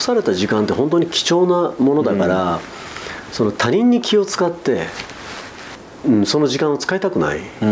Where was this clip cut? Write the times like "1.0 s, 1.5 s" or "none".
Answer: none